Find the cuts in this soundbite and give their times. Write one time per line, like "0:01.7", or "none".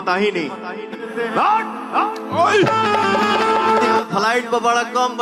0:01.1
0:04.0